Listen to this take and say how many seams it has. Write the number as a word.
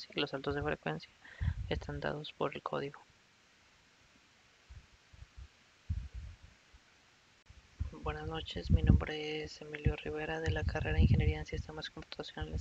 one